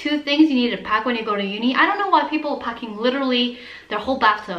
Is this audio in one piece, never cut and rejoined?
yes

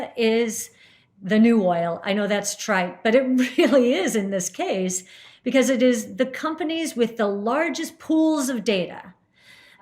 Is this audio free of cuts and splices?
yes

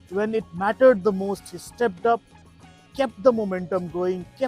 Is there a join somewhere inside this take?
no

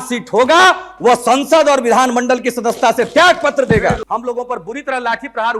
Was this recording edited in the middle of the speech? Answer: yes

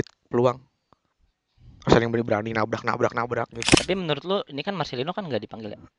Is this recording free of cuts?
no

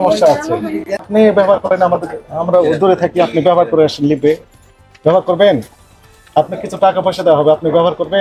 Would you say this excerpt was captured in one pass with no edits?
no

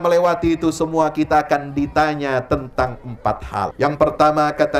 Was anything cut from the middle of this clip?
yes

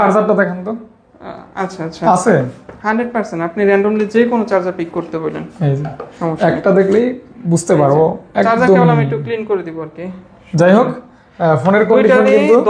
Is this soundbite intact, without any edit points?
yes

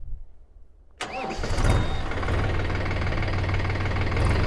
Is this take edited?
no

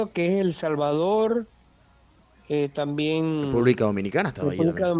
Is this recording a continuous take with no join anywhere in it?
yes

